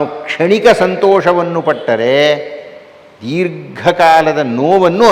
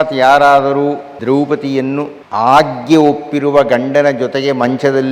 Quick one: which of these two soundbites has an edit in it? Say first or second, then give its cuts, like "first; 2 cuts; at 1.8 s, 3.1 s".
second; 2 cuts; at 1.1 s, 2.2 s